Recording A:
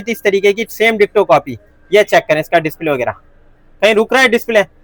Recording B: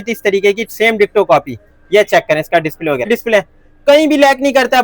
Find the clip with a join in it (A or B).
B